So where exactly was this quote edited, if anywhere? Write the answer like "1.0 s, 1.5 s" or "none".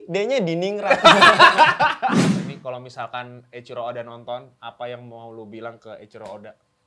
2.3 s